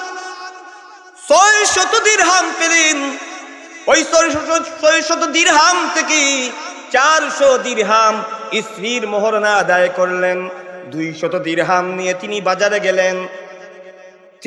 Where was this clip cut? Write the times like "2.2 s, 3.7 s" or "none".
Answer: none